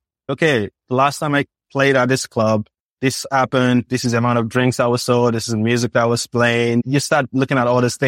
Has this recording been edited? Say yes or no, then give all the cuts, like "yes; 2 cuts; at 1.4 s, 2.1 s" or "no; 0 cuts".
no; 0 cuts